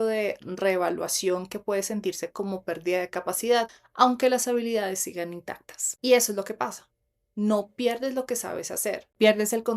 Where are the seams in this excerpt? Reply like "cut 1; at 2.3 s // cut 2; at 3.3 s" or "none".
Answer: cut 1; at 3.8 s